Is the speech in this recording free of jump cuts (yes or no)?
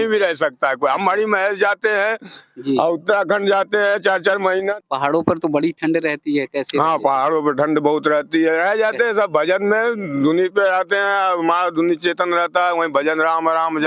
no